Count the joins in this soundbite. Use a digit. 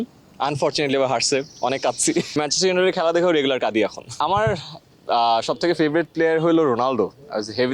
2